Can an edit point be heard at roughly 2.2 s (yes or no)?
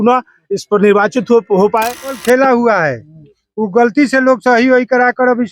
yes